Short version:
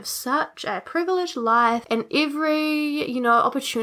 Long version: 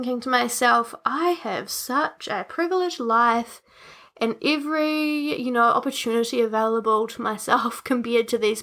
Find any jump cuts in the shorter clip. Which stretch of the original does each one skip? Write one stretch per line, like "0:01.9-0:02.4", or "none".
0:03.5-0:04.1